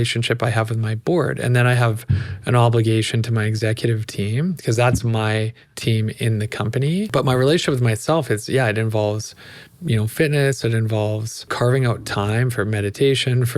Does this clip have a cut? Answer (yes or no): yes